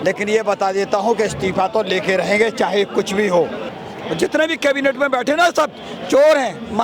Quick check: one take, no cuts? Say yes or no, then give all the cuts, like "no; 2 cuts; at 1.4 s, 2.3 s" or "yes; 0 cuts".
no; 1 cut; at 3.6 s